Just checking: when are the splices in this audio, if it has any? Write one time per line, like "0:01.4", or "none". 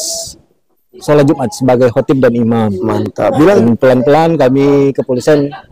0:03.6